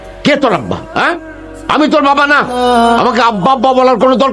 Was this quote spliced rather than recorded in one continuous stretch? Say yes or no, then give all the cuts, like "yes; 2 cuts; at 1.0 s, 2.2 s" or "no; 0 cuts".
no; 0 cuts